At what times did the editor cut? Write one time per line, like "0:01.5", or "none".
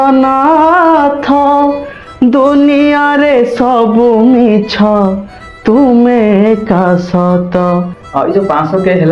0:08.0